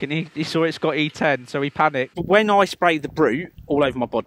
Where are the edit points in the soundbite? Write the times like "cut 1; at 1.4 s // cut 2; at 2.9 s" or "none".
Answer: cut 1; at 2.2 s